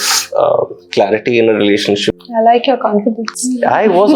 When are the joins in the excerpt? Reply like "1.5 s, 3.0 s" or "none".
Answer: 2.1 s